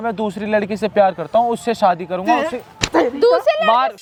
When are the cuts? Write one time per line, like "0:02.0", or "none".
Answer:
none